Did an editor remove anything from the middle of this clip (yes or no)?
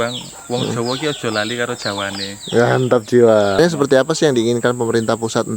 yes